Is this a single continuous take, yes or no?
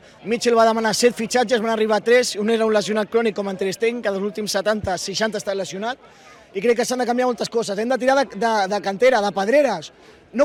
yes